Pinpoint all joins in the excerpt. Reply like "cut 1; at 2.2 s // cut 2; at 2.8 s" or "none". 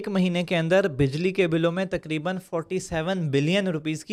none